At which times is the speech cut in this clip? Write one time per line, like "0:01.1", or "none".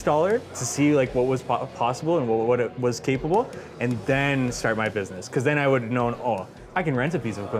none